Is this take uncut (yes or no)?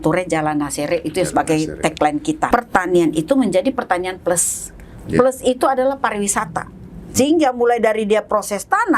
no